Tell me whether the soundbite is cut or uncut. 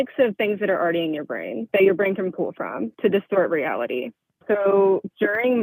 cut